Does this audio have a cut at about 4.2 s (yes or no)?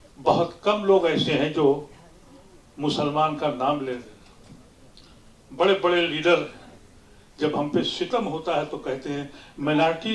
no